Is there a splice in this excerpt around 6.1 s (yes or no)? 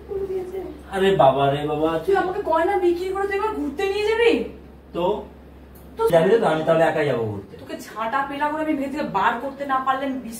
yes